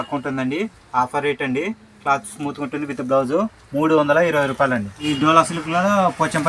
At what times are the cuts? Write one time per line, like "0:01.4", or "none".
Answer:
0:04.9